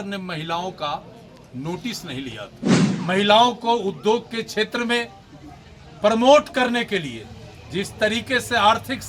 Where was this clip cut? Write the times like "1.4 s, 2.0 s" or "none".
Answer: 2.9 s